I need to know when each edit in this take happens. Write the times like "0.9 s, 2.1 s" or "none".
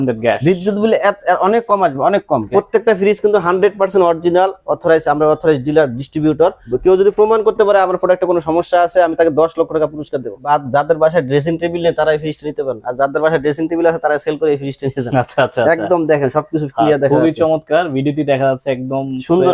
2.5 s, 6.7 s, 10.4 s